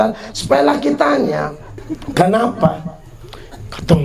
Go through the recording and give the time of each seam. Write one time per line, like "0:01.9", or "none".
0:02.0